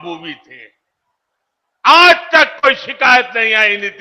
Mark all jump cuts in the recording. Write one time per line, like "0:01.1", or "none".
none